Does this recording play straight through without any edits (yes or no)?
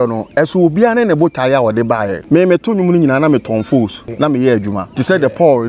no